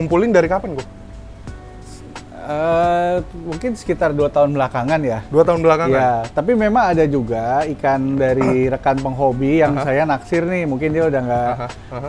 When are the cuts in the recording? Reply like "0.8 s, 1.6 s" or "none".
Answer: none